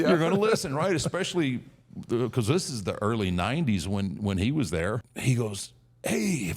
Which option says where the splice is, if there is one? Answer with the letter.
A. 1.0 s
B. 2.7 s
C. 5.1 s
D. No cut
C